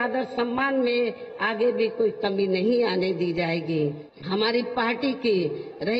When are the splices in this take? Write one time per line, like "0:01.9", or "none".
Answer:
0:04.1